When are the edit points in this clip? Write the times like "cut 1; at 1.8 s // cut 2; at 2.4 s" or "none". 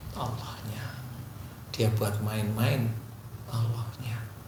none